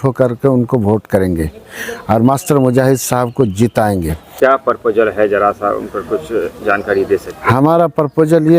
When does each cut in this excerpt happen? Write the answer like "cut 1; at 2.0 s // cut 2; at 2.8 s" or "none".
none